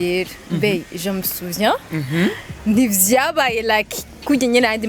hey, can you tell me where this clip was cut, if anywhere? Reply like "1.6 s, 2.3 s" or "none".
none